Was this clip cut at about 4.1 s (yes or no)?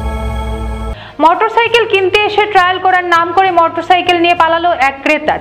no